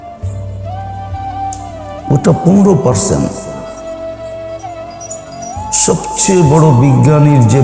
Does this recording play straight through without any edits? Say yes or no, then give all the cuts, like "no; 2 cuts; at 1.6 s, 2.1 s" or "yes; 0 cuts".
yes; 0 cuts